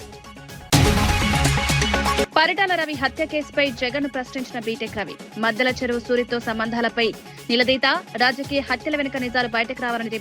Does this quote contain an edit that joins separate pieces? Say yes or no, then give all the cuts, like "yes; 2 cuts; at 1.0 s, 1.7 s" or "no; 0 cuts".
yes; 2 cuts; at 0.7 s, 2.2 s